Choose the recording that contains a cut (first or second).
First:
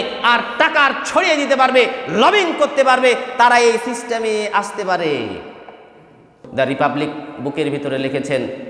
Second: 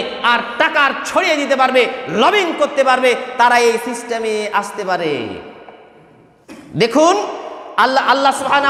first